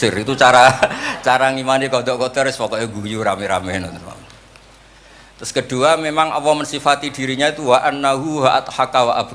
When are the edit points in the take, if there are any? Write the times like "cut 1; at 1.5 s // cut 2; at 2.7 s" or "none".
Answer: none